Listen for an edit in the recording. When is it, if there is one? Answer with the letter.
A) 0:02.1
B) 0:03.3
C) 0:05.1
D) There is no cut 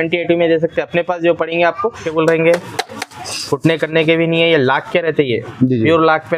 A